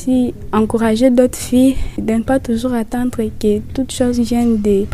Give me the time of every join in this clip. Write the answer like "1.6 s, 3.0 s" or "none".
none